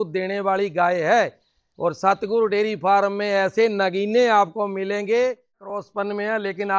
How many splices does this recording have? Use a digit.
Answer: 1